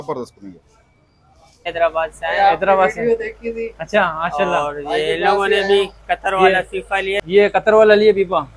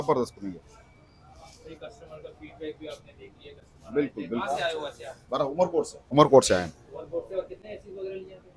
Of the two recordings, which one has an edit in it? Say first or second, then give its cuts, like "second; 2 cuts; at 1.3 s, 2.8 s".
first; 2 cuts; at 1.7 s, 7.2 s